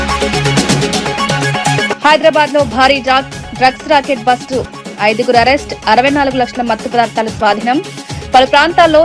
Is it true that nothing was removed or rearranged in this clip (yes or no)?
no